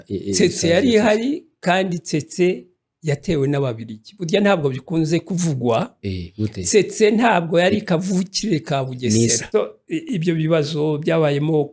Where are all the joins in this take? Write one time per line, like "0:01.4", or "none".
0:09.4

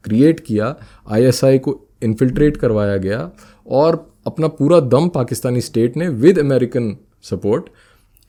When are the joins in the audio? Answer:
none

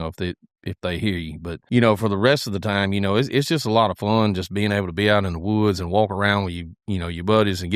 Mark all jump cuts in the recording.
0:01.6

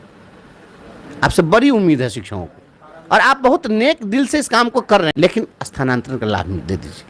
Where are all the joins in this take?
0:05.1

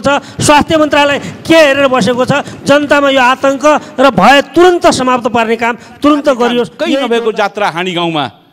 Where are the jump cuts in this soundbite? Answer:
0:06.8

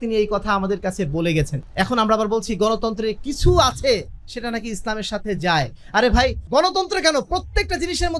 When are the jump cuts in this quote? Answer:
0:01.6
0:06.4

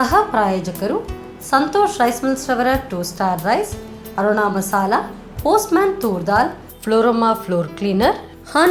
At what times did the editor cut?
none

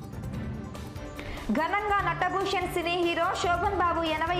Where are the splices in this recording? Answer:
0:00.9

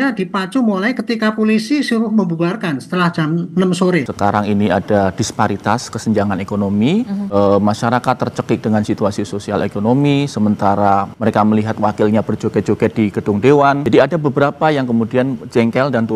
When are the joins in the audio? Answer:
0:04.1
0:07.2
0:11.1
0:13.8

